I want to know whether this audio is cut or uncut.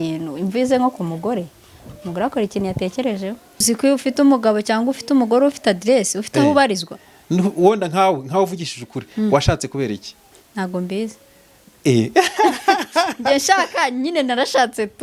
cut